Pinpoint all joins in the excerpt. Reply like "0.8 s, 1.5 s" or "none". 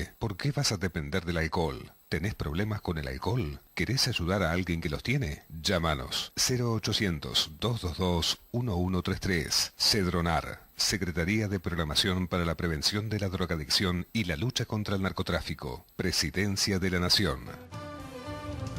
17.6 s